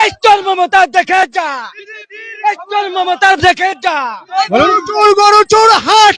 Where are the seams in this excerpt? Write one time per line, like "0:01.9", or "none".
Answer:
0:04.2